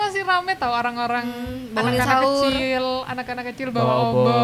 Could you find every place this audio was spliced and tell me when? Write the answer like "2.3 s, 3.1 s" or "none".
none